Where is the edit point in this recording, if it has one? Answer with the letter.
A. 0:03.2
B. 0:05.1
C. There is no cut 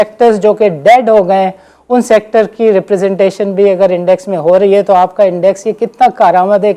C